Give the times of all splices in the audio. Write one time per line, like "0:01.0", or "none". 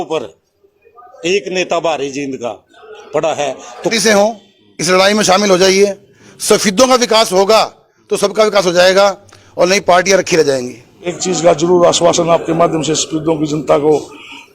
0:03.9
0:11.0